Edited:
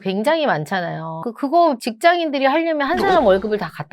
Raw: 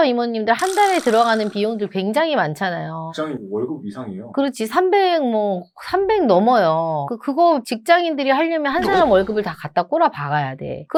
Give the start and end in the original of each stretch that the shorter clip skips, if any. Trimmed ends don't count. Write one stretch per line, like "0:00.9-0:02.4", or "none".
0:03.1-0:07.1